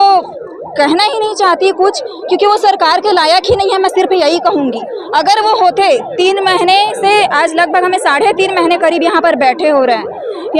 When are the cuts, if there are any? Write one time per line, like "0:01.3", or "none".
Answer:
none